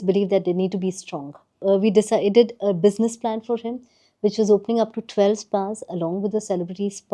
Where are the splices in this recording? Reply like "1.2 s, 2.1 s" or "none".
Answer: 1.6 s